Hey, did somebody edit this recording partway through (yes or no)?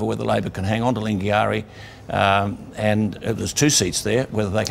no